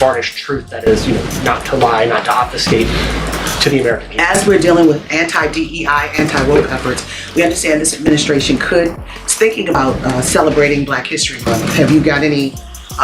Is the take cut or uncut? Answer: cut